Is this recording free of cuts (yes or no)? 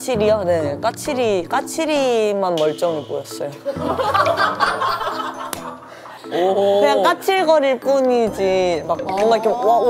no